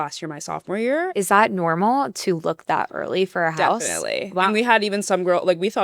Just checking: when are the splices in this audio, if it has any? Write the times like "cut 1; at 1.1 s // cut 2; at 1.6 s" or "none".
cut 1; at 1.1 s